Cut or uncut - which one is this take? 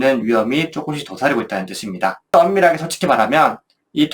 cut